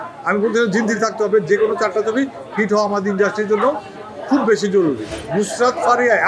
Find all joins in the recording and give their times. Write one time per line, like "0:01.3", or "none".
0:05.1